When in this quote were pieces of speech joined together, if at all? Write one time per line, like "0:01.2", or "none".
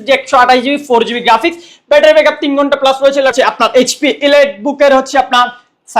0:03.3

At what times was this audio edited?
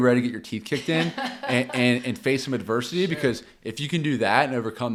none

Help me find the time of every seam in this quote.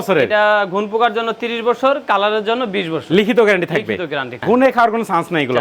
0:04.3

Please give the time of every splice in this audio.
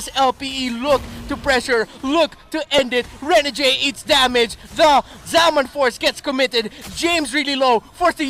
none

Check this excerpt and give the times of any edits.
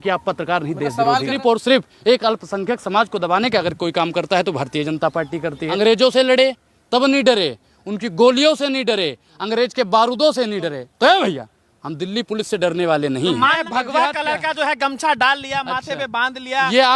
0:01.4
0:05.7
0:13.6

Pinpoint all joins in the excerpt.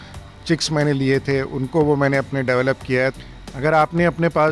0:03.2

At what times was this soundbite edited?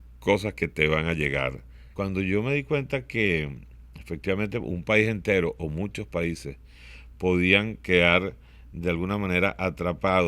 0:01.9

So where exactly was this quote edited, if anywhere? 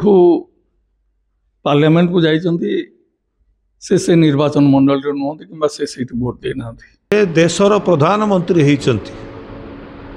0:06.9

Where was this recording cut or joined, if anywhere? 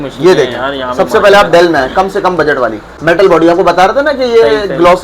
0:02.9

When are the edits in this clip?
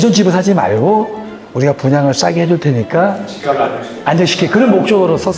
none

